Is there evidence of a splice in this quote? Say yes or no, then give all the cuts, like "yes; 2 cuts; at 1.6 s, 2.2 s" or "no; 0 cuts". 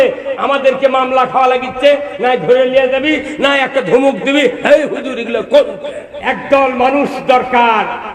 yes; 1 cut; at 6.1 s